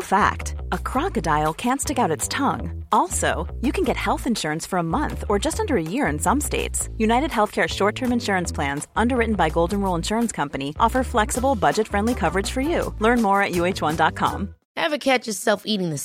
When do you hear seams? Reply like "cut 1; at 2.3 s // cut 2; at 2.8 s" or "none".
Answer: cut 1; at 14.6 s